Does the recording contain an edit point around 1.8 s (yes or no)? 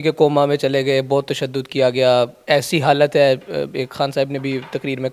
no